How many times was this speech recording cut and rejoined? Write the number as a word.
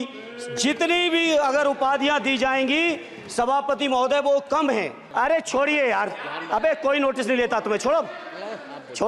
one